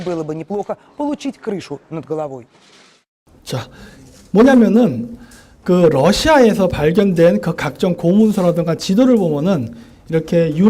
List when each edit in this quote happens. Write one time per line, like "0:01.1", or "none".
0:07.2